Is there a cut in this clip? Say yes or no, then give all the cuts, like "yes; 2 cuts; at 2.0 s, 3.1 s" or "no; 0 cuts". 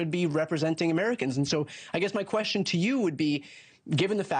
no; 0 cuts